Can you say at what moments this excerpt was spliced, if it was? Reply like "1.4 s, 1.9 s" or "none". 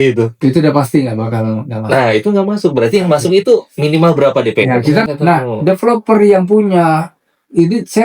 5.1 s